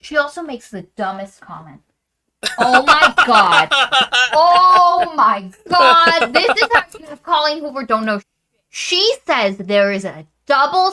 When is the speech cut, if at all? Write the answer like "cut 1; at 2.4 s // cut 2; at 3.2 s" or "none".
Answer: cut 1; at 8.3 s